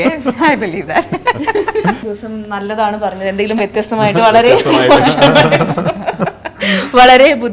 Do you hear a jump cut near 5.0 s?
no; 1 cut; at 2.0 s

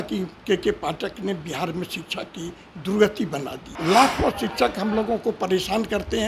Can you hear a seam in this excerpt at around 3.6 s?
yes; 1 cut; at 3.6 s

